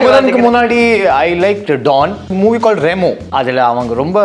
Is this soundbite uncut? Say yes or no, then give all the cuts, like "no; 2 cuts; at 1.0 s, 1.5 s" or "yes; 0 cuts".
no; 2 cuts; at 2.3 s, 3.3 s